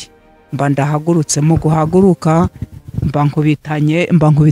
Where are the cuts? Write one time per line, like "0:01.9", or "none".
none